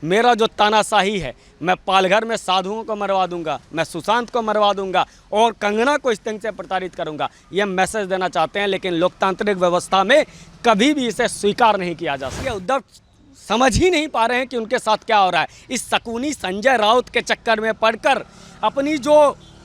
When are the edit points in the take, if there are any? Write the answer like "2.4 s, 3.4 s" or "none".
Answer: 12.5 s